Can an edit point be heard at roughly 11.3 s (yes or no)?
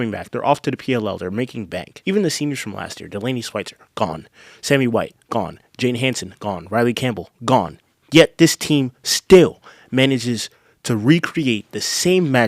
no